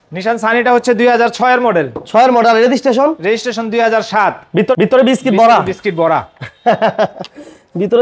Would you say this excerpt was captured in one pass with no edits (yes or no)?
yes